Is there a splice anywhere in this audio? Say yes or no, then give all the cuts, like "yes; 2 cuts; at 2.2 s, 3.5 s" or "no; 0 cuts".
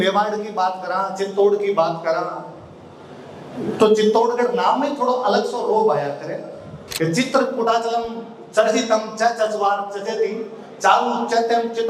yes; 1 cut; at 6.8 s